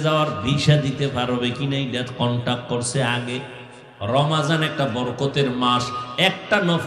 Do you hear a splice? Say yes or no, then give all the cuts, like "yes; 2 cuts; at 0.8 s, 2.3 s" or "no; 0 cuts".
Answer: yes; 1 cut; at 3.9 s